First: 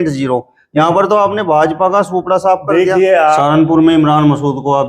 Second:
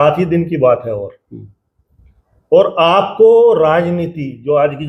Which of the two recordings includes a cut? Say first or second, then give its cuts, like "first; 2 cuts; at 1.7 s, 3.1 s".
first; 1 cut; at 3.4 s